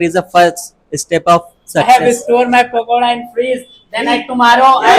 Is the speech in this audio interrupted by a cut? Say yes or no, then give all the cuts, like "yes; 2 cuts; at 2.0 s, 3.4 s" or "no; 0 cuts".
yes; 1 cut; at 1.8 s